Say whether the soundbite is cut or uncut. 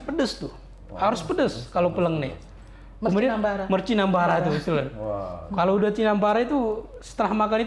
uncut